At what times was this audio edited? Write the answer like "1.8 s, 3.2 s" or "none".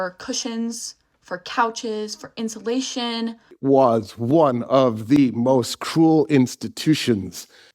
3.5 s